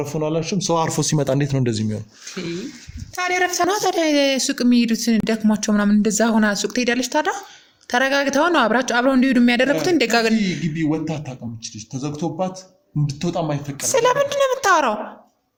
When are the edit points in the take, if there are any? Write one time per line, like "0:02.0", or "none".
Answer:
none